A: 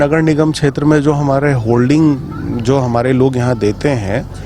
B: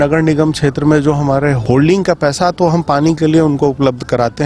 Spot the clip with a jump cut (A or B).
B